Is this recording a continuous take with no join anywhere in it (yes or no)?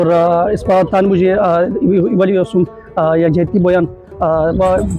yes